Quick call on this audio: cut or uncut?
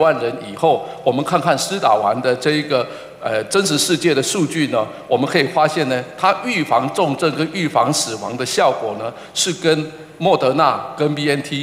uncut